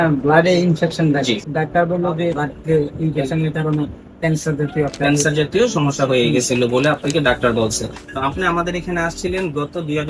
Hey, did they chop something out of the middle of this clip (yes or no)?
yes